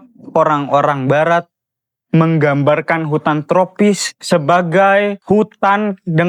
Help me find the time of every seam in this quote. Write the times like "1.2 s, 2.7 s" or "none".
none